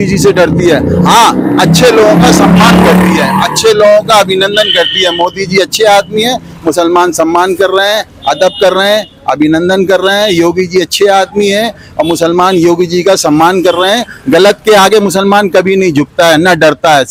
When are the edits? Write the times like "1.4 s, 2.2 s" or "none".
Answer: none